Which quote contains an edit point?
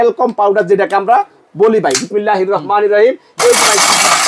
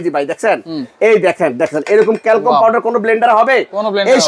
first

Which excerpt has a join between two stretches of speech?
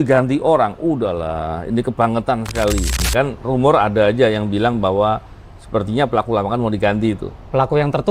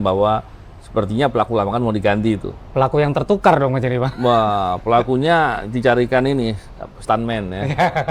first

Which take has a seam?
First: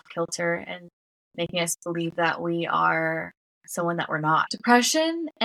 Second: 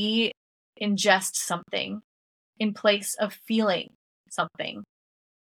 first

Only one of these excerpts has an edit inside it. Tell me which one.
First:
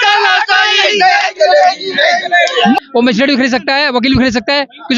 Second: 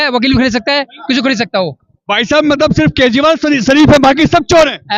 first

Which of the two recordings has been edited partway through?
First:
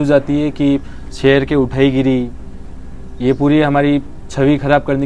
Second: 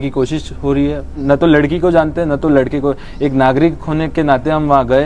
second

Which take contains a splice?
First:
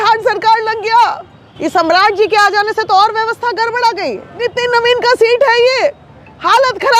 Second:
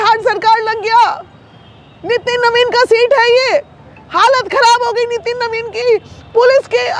first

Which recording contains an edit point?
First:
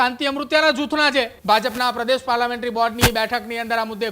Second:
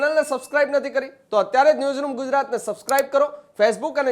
first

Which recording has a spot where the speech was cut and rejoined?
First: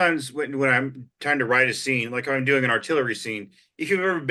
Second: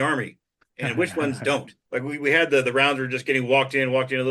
second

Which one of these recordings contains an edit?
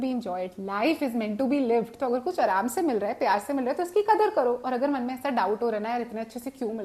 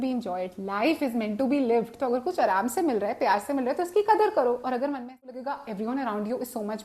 second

